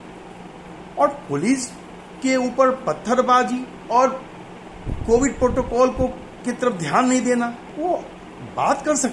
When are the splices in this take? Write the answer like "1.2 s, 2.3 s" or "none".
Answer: 3.7 s, 6.3 s, 7.6 s